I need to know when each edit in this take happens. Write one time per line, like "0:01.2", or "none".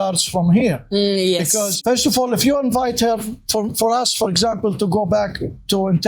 none